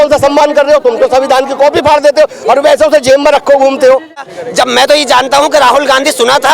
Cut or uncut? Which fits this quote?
cut